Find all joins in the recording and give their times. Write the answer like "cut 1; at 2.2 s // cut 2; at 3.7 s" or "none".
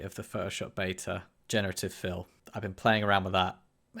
cut 1; at 1.3 s // cut 2; at 2.6 s